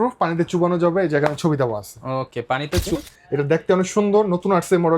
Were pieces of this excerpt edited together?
yes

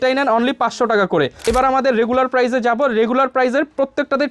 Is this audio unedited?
no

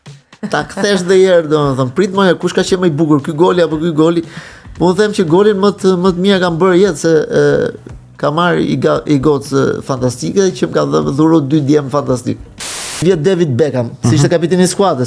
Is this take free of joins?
no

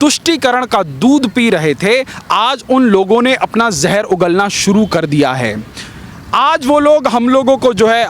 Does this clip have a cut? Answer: no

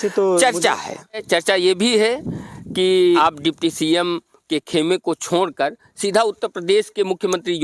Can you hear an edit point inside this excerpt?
yes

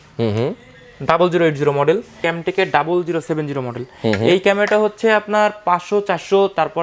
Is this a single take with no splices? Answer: no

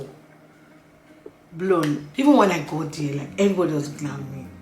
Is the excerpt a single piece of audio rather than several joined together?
no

